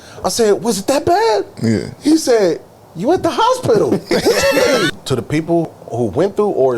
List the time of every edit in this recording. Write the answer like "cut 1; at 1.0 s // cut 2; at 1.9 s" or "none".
cut 1; at 4.9 s // cut 2; at 5.7 s